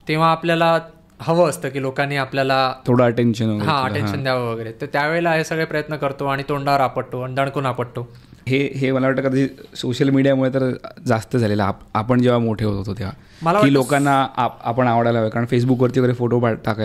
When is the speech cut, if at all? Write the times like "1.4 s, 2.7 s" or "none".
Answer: 8.3 s